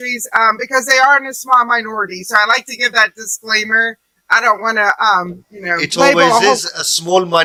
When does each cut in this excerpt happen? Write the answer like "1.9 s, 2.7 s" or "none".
none